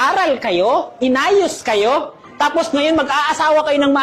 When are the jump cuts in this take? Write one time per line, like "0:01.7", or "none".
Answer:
0:00.9